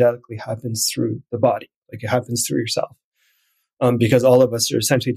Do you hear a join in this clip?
no; 0 cuts

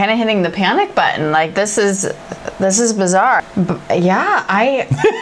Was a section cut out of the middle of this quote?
yes; 1 cut; at 3.4 s

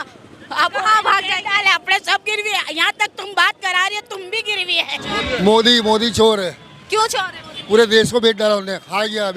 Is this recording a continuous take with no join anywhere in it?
no; 1 cut; at 5.0 s

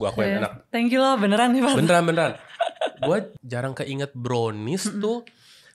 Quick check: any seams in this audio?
yes; 1 cut; at 3.3 s

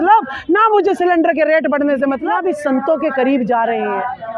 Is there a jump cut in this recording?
yes; 1 cut; at 2.3 s

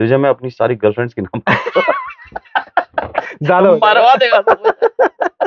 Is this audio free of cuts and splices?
yes; 0 cuts

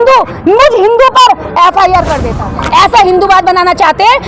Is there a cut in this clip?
yes; 1 cut; at 2.2 s

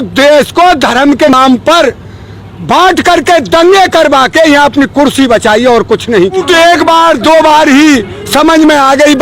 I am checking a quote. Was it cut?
yes; 2 cuts; at 1.3 s, 6.4 s

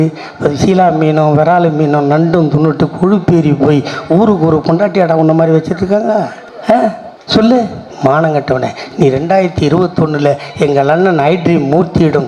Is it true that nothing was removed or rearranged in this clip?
yes; 0 cuts

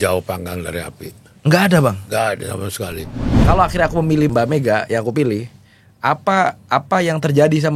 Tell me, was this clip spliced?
yes; 1 cut; at 3.3 s

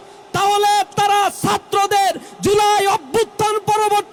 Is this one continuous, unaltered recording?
yes; 0 cuts

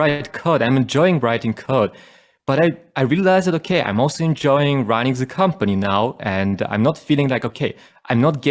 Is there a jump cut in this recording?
no; 0 cuts

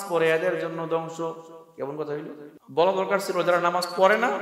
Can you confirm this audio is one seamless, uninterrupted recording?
no; 1 cut; at 2.5 s

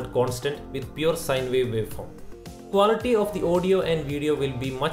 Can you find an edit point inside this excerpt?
yes; 1 cut; at 2.7 s

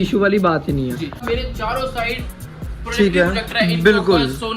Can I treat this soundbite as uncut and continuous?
no; 1 cut; at 1.2 s

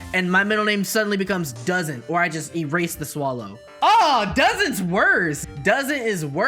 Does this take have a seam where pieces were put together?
yes; 2 cuts; at 3.6 s, 5.4 s

